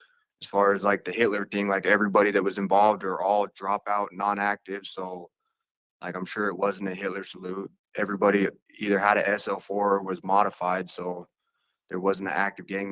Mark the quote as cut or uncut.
cut